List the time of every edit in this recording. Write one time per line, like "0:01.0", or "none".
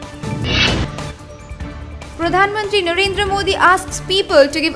none